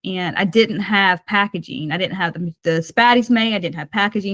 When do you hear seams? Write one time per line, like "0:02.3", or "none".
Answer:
none